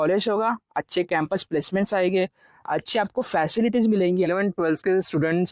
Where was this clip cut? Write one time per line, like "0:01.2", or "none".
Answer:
0:04.3